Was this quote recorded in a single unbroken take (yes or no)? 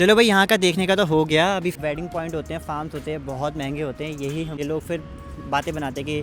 no